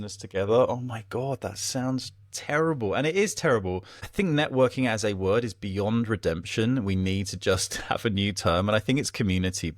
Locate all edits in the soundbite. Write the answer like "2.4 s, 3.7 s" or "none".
4.0 s